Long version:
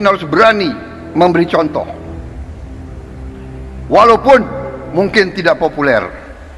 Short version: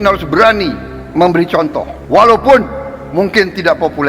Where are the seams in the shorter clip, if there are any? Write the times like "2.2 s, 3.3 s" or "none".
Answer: 2.0 s